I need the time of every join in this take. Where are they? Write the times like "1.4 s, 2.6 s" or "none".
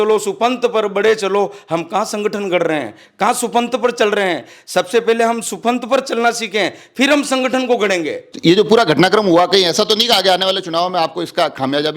none